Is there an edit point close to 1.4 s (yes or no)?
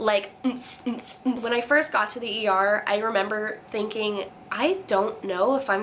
yes